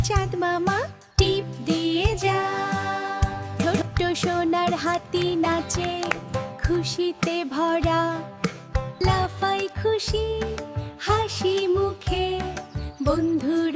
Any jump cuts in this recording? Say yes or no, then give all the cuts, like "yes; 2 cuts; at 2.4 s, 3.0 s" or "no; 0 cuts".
yes; 1 cut; at 3.4 s